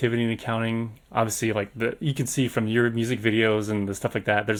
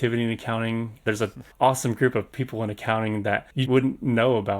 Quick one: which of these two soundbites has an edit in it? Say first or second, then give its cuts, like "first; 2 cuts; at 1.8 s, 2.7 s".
second; 2 cuts; at 1.1 s, 3.6 s